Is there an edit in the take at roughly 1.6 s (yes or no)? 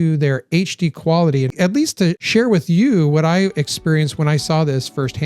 yes